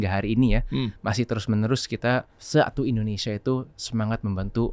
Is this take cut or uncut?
cut